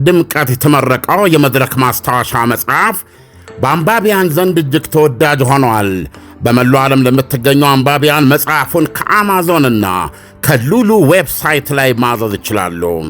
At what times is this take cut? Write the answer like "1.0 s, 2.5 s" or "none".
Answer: none